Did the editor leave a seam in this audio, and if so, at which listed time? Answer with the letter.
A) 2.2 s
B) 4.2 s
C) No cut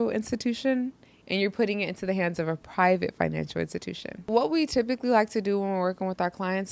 B